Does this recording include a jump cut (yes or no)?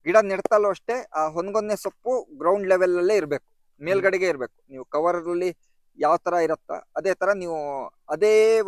no